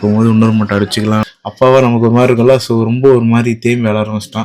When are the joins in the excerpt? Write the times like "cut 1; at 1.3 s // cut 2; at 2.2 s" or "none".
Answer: cut 1; at 1.3 s